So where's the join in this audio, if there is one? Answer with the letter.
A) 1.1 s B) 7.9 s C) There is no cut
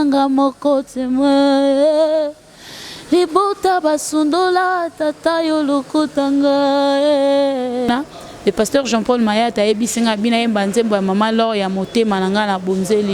B